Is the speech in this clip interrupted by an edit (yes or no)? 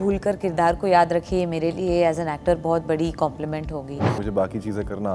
yes